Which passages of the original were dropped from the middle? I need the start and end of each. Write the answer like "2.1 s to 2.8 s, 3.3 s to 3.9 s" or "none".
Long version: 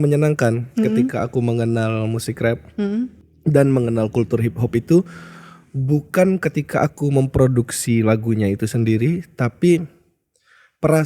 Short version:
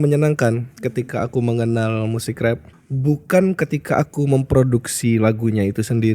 2.7 s to 5.5 s